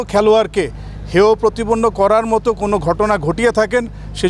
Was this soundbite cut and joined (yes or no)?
no